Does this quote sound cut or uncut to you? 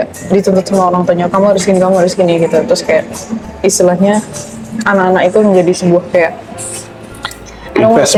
uncut